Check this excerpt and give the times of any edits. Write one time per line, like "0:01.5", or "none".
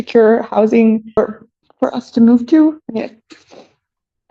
0:01.1
0:02.8